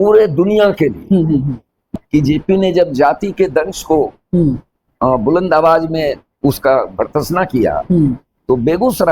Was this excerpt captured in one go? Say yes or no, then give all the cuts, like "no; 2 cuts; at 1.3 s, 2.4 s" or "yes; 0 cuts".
no; 1 cut; at 1.8 s